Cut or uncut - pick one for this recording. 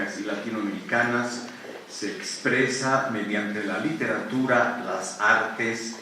cut